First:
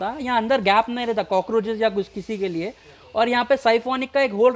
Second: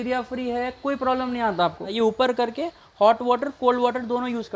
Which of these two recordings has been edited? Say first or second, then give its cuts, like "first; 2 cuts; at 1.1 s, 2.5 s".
second; 1 cut; at 1.9 s